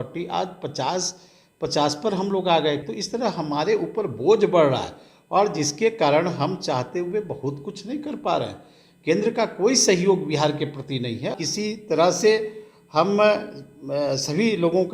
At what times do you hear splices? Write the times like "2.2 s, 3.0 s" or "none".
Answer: 2.8 s, 11.3 s

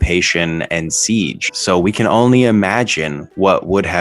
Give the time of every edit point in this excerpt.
1.4 s

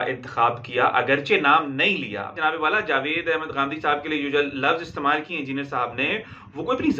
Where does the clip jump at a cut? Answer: 2.4 s

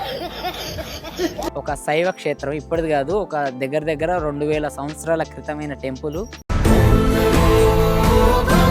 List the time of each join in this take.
1.5 s

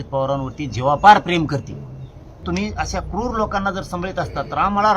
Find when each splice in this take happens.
2.4 s

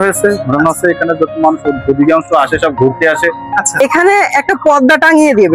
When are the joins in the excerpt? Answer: 3.8 s

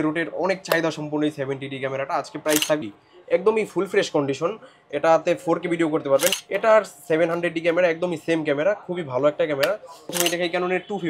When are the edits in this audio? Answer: 2.8 s, 6.4 s, 10.1 s

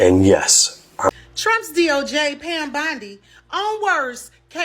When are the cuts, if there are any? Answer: 1.1 s

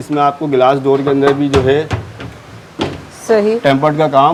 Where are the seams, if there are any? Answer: none

